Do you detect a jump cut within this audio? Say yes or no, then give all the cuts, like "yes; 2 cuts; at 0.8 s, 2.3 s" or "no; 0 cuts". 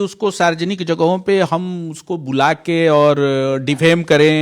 no; 0 cuts